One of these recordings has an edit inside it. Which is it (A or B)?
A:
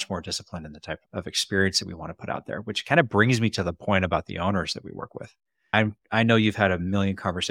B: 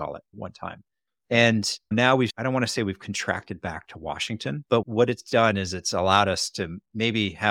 B